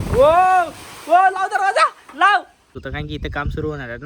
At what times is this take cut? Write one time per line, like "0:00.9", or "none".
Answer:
0:02.8